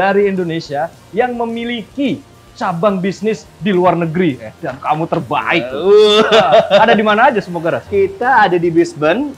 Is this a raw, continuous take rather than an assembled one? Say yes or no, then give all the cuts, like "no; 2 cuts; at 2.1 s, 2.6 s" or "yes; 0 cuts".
yes; 0 cuts